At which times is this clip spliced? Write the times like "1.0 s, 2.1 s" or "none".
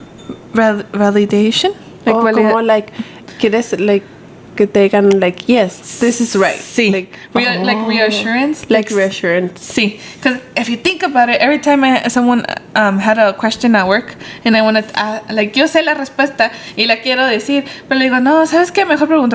none